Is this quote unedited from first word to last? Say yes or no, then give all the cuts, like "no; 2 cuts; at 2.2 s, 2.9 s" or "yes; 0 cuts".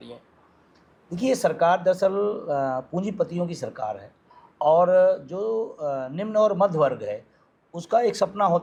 yes; 0 cuts